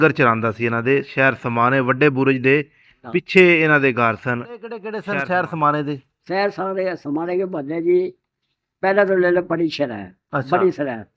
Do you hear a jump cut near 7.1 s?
no; 1 cut; at 4.9 s

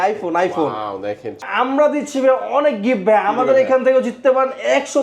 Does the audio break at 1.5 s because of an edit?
yes; 1 cut; at 1.5 s

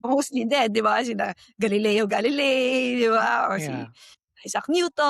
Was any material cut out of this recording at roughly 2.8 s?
no; 0 cuts

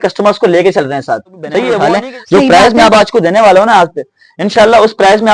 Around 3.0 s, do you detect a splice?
no; 1 cut; at 1.8 s

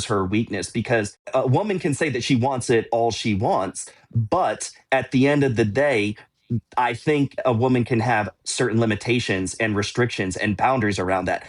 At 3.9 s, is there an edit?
no; 2 cuts; at 1.3 s, 7.4 s

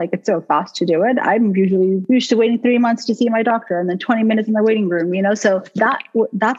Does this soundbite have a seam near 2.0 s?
yes; 2 cuts; at 2.0 s, 5.7 s

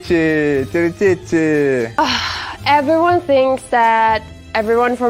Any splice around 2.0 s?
yes; 1 cut; at 2.0 s

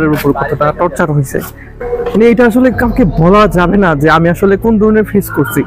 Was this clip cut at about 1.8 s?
yes; 1 cut; at 1.8 s

